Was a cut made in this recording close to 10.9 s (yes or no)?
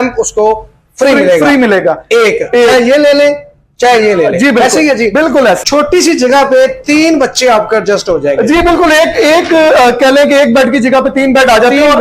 no